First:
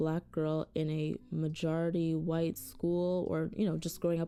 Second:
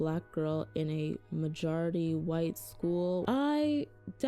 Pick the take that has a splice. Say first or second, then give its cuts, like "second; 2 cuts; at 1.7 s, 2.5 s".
second; 1 cut; at 3.2 s